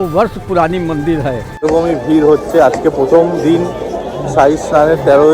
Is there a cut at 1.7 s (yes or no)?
yes